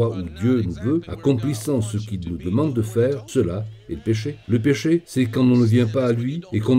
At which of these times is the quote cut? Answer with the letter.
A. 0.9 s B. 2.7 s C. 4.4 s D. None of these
C